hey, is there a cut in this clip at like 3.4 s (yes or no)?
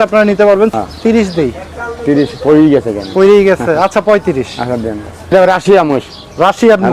no